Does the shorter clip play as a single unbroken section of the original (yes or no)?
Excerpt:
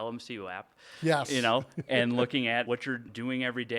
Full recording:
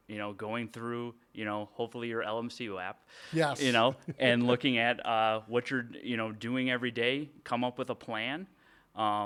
no